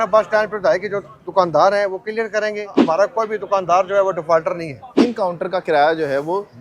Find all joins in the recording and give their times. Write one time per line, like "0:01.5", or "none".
0:02.8
0:04.9